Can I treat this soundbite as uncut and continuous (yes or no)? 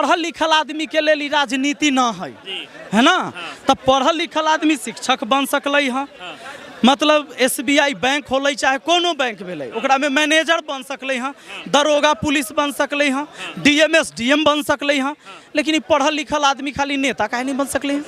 yes